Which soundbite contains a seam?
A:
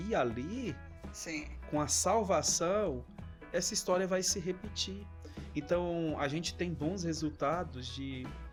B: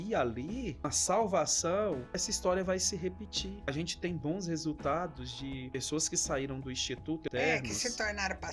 B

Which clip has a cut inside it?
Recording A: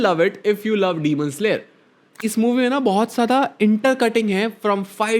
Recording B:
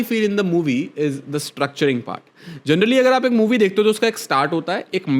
A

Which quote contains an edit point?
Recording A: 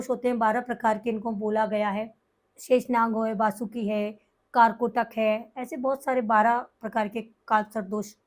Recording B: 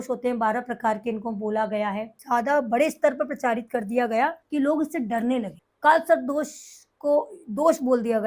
B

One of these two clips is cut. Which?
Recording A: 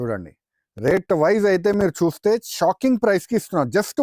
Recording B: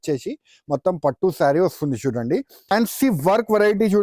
B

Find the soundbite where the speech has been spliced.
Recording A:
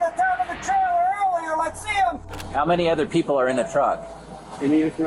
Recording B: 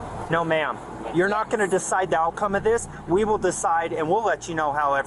A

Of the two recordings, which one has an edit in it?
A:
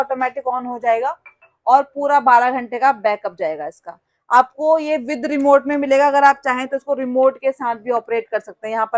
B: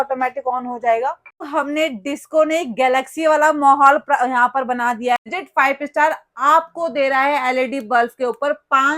B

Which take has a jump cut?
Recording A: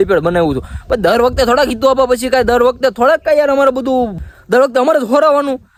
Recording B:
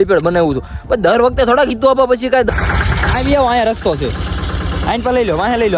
B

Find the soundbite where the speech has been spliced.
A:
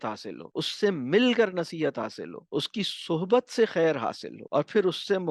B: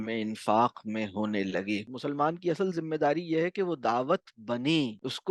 B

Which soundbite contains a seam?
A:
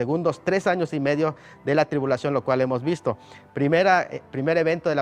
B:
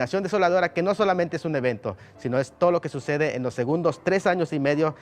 B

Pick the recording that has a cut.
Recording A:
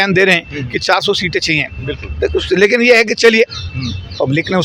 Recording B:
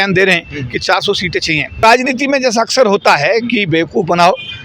B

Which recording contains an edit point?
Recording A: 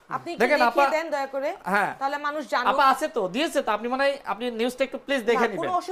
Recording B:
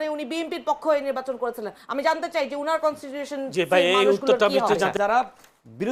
B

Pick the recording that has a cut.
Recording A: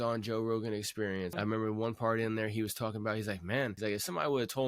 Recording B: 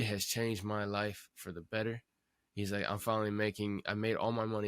A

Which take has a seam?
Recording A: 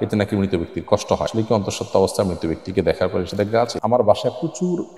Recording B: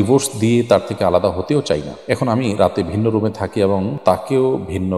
A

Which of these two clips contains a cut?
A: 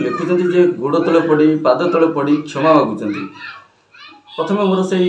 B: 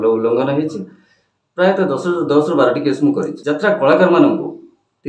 B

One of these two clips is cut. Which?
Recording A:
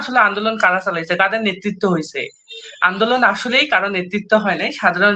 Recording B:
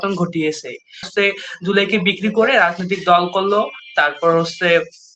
B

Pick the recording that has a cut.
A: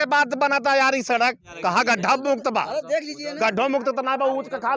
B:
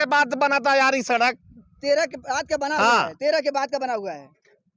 A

